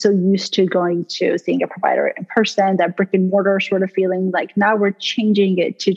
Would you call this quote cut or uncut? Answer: uncut